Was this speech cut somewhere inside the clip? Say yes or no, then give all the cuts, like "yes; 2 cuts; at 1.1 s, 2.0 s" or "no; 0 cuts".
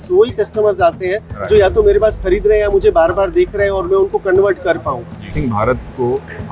yes; 1 cut; at 5.3 s